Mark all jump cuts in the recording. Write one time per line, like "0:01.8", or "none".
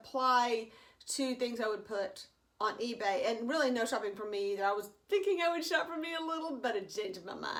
none